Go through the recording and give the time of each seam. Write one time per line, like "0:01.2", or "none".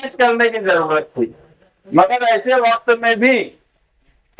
none